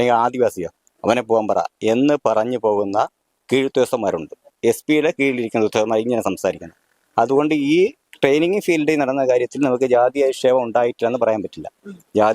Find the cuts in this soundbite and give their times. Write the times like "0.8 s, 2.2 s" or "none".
none